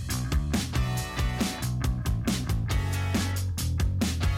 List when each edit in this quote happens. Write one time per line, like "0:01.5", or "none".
0:01.9